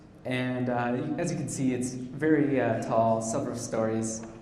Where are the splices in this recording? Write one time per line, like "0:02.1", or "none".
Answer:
0:02.4

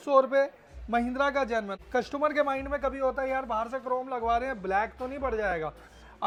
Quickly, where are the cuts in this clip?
none

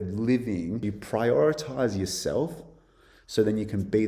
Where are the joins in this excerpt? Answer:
0:01.0

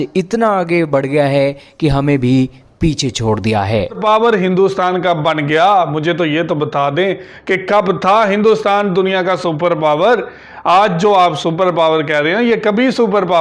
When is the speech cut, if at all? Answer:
0:04.0

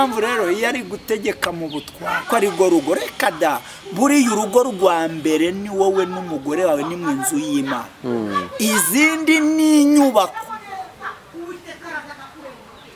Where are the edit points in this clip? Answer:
0:02.2

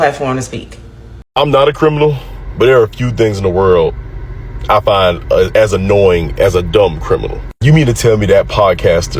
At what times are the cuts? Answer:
0:01.2

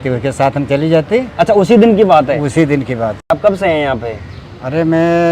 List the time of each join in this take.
0:03.2

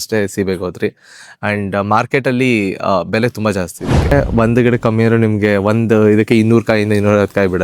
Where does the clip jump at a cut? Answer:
0:04.1

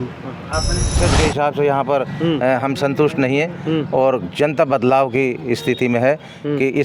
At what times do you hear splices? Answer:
0:00.9

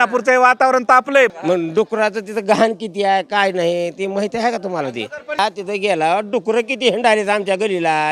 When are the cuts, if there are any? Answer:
0:01.3
0:05.4

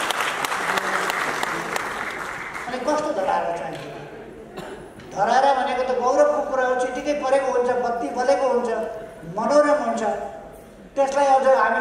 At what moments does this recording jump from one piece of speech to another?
none

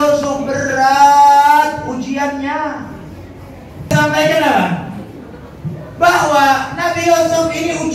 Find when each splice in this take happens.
0:03.9

